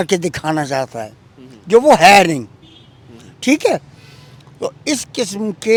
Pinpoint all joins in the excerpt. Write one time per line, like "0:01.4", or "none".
none